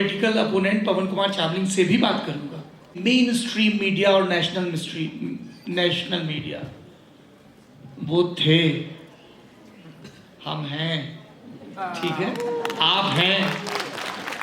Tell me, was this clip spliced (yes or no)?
yes